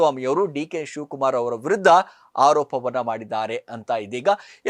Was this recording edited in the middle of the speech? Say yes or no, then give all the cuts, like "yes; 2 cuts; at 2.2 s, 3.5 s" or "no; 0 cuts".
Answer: no; 0 cuts